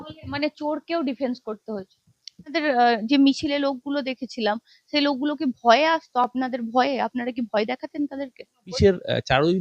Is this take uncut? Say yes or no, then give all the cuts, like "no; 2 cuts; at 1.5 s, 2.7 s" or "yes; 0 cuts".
no; 2 cuts; at 2.5 s, 8.7 s